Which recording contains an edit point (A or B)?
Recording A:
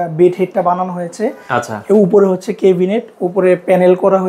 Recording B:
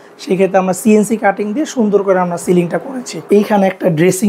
B